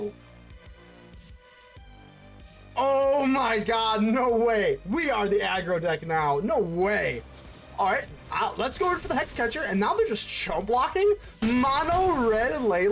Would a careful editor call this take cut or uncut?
uncut